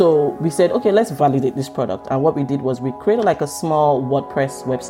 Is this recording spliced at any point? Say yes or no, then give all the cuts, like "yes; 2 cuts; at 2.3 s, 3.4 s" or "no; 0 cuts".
yes; 1 cut; at 1.1 s